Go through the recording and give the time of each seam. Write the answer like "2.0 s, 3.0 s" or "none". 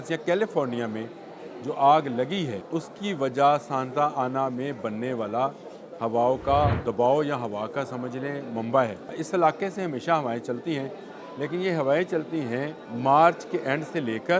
2.6 s, 6.8 s, 9.2 s, 12.8 s